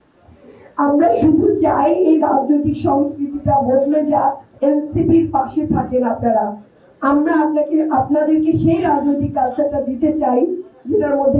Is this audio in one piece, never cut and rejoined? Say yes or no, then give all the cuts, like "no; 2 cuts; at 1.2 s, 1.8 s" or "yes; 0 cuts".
no; 1 cut; at 4.5 s